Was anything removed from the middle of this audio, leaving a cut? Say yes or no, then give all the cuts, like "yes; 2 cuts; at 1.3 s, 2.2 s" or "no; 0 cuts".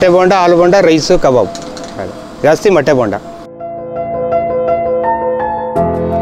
yes; 1 cut; at 3.7 s